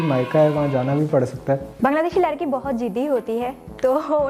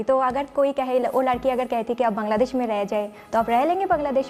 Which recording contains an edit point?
first; 1 cut; at 1.7 s

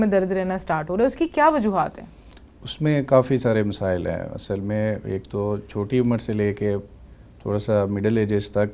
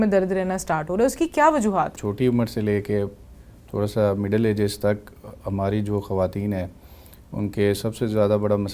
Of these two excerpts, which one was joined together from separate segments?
second; 1 cut; at 2.0 s

